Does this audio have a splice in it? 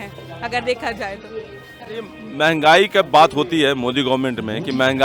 no; 0 cuts

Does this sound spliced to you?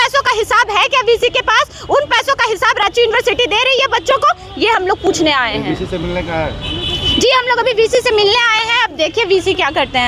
no; 0 cuts

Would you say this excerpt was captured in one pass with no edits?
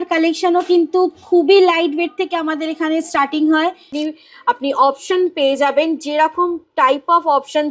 no; 1 cut; at 3.9 s

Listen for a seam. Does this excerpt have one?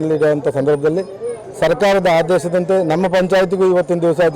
no; 0 cuts

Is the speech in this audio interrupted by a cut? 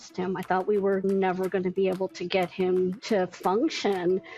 yes; 1 cut; at 1.0 s

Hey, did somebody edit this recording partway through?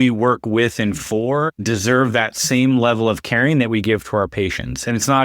yes; 1 cut; at 1.6 s

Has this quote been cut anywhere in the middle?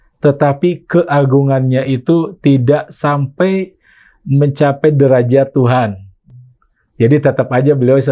no; 0 cuts

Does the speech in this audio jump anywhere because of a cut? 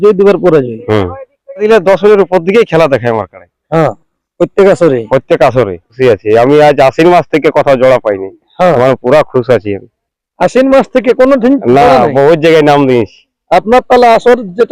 yes; 2 cuts; at 1.6 s, 5.9 s

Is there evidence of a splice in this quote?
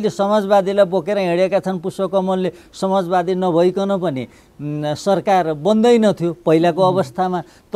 no; 0 cuts

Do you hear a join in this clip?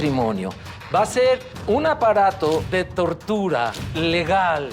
yes; 3 cuts; at 1.5 s, 2.7 s, 3.8 s

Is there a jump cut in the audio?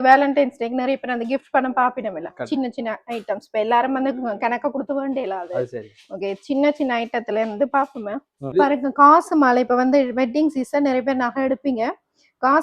yes; 1 cut; at 8.5 s

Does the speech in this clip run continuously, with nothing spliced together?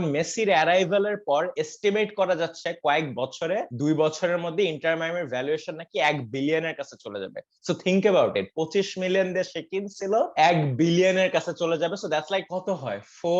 yes; 0 cuts

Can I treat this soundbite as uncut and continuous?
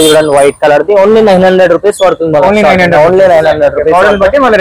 yes; 0 cuts

